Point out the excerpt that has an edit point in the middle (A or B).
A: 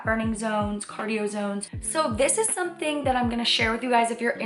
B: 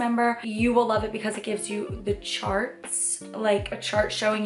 A